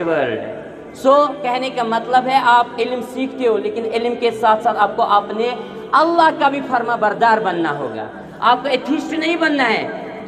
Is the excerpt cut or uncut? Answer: uncut